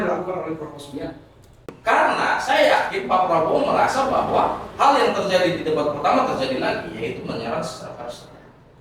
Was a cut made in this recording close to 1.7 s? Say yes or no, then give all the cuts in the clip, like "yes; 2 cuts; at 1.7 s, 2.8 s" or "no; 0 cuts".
yes; 1 cut; at 1.7 s